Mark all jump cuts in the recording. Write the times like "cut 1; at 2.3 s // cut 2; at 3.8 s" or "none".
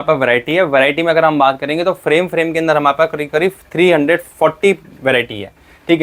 none